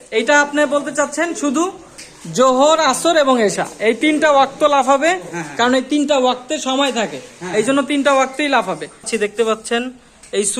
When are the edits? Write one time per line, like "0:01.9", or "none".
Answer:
0:09.1

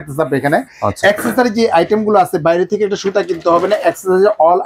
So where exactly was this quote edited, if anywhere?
none

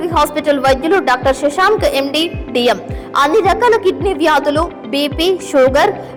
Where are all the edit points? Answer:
none

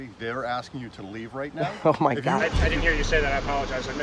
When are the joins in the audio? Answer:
0:02.4

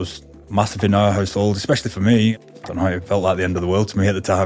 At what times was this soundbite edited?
0:02.4

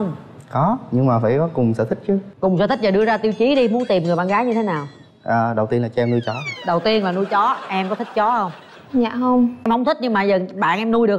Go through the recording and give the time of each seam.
0:09.7

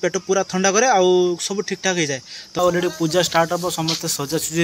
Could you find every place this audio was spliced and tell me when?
0:02.6

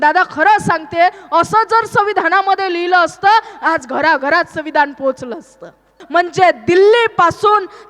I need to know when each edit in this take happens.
0:05.9

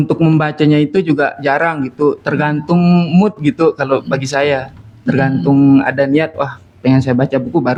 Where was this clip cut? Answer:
none

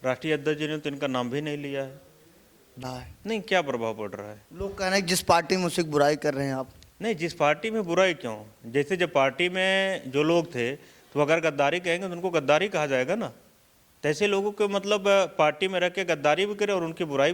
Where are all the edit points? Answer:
0:02.8

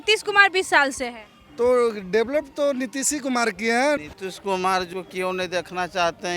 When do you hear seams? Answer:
0:04.0

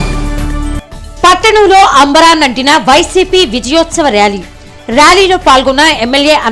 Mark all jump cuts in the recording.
0:00.9

